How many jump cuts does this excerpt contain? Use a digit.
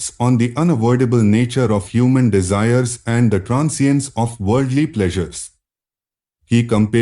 1